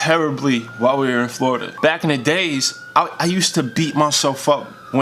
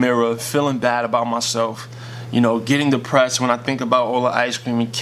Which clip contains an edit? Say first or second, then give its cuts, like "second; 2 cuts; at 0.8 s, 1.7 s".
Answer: first; 1 cut; at 1.7 s